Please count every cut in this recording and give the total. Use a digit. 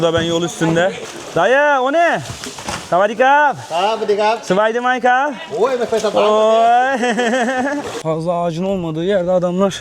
2